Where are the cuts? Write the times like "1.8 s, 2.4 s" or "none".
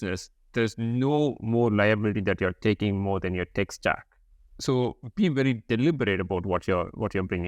4.5 s